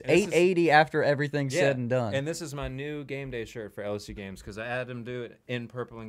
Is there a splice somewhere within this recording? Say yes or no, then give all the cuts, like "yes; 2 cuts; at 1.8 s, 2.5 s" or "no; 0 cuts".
no; 0 cuts